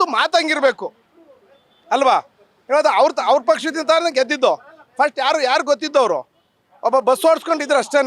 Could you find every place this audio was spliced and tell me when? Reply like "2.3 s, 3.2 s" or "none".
none

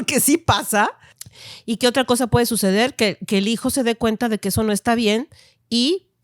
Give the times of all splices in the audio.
1.1 s

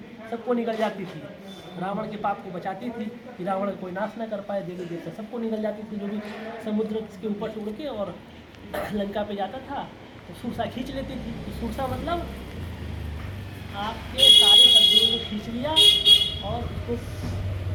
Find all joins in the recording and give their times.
none

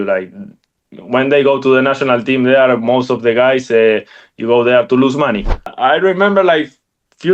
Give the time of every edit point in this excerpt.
5.7 s

